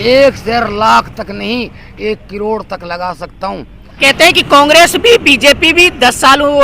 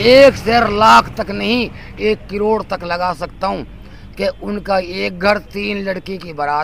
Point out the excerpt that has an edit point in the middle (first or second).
first